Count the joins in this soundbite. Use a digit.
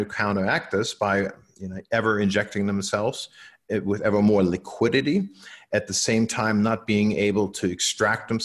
0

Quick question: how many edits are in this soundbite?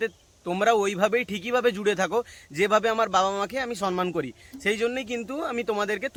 0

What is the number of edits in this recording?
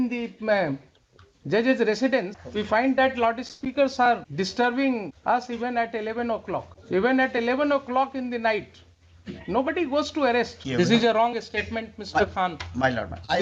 5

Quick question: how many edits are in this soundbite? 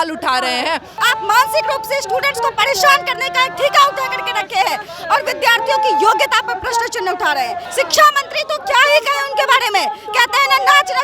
2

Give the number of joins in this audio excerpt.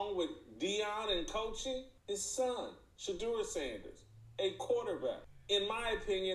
2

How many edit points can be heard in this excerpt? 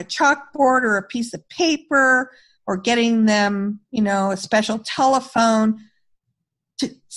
0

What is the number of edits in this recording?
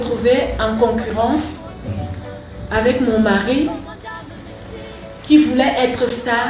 0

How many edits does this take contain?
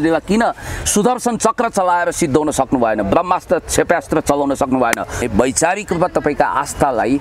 1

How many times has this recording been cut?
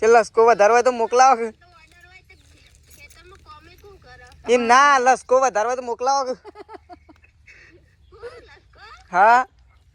0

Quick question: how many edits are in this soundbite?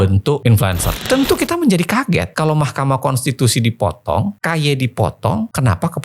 1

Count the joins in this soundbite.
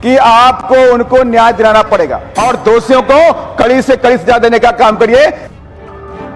2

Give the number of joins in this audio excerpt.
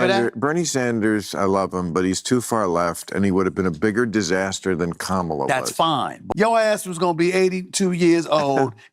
1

